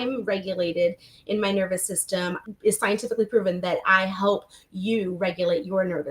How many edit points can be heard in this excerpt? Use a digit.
1